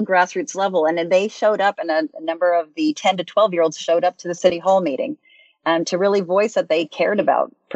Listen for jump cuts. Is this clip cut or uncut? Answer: cut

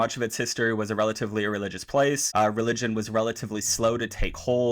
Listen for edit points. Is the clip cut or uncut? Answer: cut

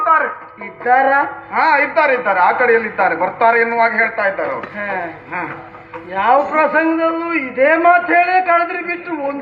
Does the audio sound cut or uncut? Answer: uncut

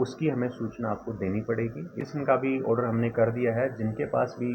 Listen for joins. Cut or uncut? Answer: cut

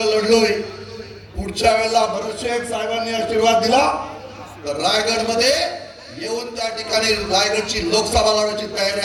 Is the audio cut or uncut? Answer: uncut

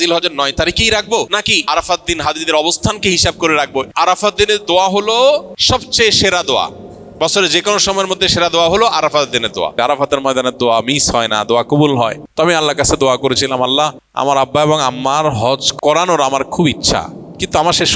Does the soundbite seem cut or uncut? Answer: cut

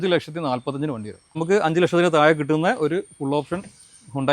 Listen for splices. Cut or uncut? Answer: cut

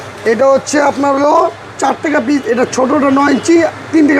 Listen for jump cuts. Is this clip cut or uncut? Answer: uncut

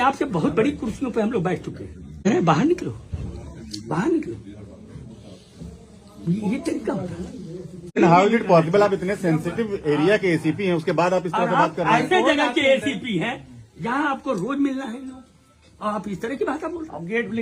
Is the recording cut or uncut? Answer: cut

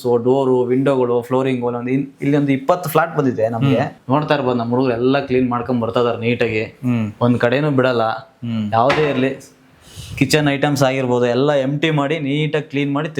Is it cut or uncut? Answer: cut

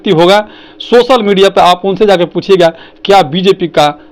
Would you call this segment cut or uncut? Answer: uncut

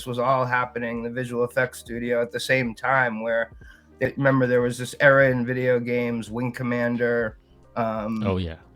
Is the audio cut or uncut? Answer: cut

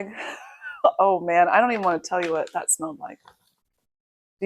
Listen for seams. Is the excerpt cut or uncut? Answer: uncut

